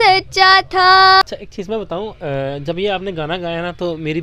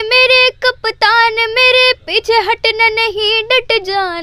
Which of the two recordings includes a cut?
first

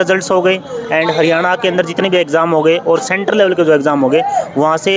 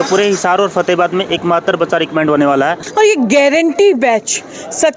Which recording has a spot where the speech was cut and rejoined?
second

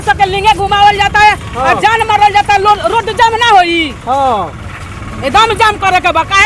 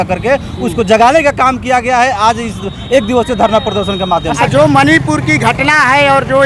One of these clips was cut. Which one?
second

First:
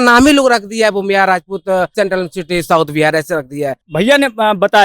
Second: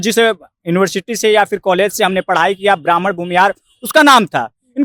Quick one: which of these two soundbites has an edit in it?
first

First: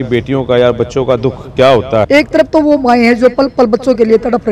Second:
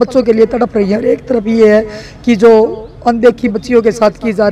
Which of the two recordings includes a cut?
first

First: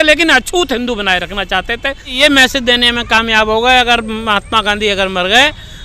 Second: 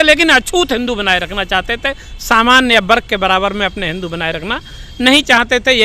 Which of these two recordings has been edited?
first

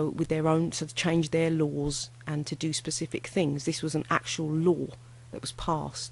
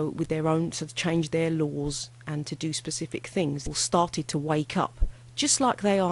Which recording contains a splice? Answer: first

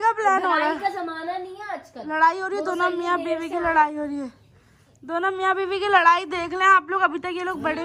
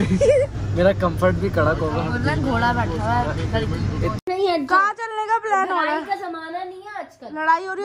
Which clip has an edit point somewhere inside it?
second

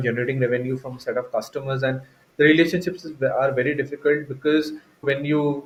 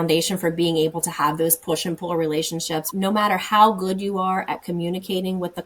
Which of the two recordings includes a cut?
second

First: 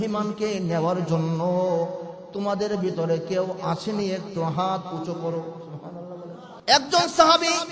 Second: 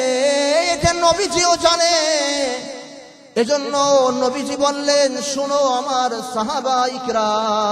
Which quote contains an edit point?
first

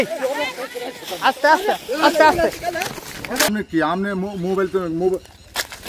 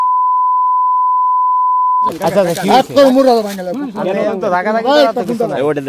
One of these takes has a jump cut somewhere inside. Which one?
first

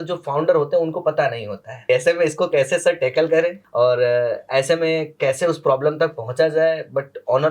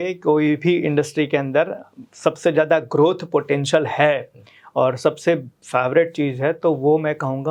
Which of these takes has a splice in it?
first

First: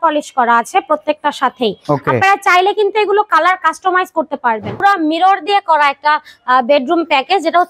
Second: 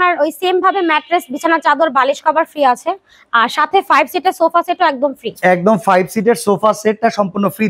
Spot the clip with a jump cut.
first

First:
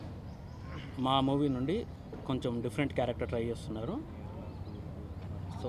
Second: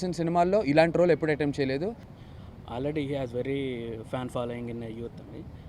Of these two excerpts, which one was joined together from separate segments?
second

